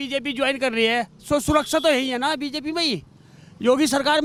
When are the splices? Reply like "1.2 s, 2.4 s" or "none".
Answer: none